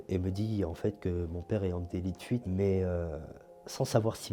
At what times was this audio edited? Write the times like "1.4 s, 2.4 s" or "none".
2.4 s

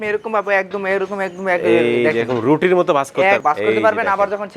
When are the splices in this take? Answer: 3.4 s

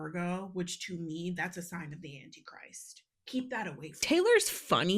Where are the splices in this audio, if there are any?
4.0 s

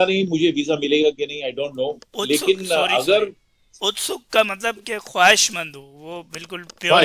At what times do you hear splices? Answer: none

